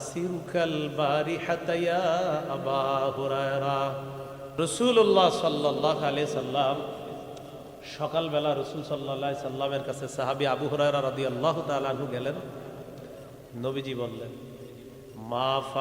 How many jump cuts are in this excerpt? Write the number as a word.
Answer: one